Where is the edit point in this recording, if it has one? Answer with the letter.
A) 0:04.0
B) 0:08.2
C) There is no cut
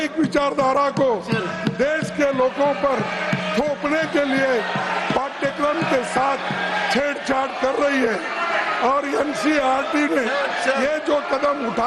C